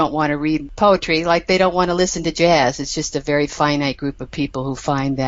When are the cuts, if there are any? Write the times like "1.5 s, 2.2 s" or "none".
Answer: none

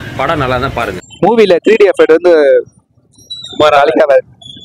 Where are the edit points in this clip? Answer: 1.1 s

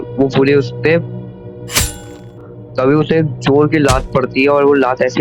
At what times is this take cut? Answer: 2.5 s

